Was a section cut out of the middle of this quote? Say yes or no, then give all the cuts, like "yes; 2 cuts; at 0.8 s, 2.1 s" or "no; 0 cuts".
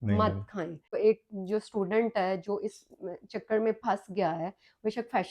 yes; 1 cut; at 1.0 s